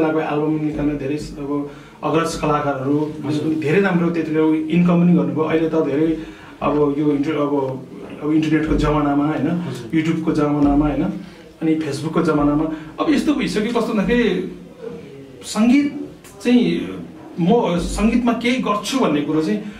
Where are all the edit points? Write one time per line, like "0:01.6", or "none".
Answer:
none